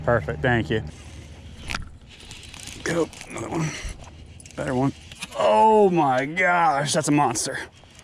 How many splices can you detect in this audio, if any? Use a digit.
1